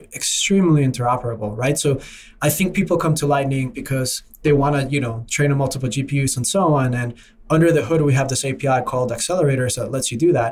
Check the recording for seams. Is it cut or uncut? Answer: uncut